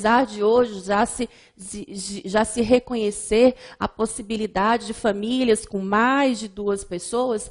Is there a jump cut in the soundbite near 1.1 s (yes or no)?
yes